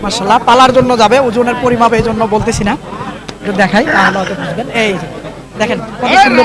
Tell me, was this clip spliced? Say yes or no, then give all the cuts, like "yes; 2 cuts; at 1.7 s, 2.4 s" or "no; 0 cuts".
no; 0 cuts